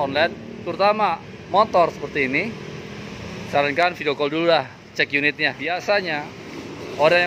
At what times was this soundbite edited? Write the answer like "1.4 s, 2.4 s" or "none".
5.6 s

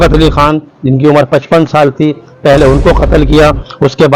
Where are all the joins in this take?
none

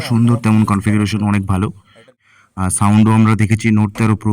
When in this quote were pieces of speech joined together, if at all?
2.1 s

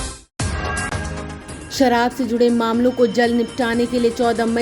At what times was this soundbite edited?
1.1 s

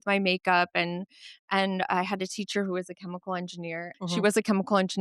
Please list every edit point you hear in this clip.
3.9 s

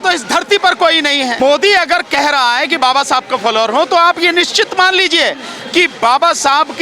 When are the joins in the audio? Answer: 1.4 s

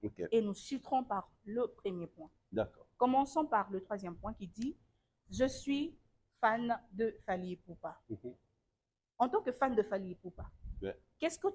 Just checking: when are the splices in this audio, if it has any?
none

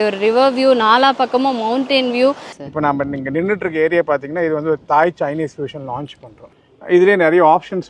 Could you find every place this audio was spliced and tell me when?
2.5 s, 6.5 s

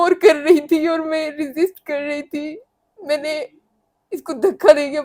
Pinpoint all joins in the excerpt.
none

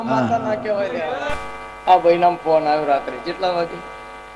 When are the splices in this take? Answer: 1.1 s

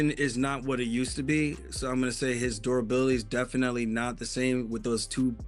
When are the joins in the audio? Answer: none

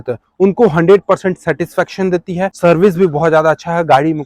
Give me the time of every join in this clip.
2.5 s

